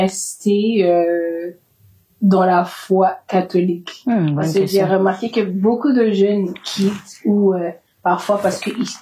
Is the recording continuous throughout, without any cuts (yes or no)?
yes